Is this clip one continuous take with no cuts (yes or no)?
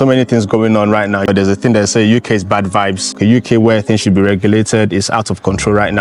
no